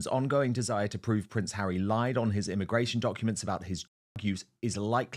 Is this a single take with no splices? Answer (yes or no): yes